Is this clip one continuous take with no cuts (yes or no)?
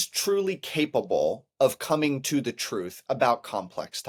yes